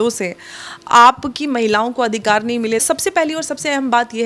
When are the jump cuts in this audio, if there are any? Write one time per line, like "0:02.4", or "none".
0:02.8